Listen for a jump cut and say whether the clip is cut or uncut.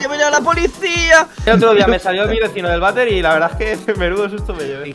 cut